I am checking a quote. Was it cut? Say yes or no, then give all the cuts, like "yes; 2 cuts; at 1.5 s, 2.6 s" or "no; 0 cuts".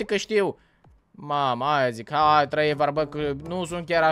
no; 0 cuts